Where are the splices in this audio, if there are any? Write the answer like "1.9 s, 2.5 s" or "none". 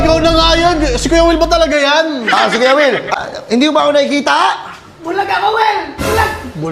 3.1 s